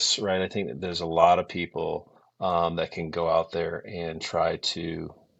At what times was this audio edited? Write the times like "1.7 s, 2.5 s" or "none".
none